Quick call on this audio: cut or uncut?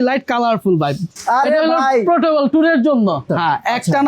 cut